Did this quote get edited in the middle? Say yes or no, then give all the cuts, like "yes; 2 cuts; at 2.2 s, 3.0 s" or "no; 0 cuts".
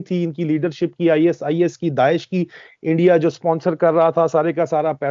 no; 0 cuts